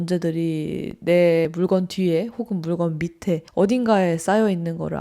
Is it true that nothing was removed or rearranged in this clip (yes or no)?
no